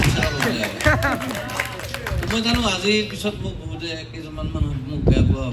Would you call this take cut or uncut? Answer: uncut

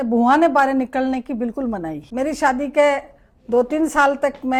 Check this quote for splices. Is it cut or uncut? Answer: uncut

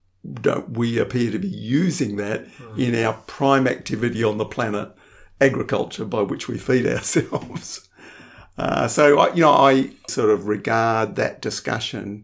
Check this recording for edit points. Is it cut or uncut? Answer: cut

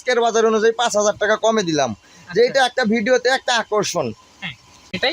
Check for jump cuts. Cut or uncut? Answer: uncut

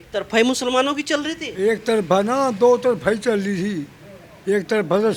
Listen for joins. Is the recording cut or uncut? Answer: uncut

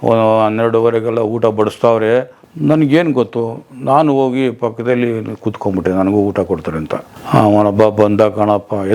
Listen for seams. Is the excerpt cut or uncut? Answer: cut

